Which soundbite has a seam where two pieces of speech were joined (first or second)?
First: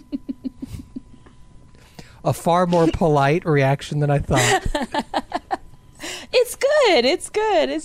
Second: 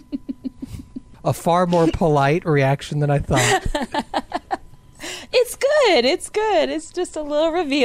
second